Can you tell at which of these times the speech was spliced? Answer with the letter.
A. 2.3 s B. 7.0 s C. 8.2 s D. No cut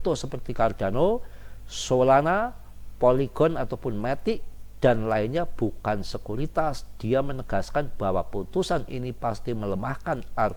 D